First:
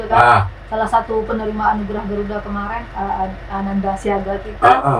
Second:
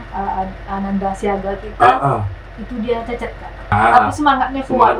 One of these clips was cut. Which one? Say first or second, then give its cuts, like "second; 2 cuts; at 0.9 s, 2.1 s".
second; 1 cut; at 3.7 s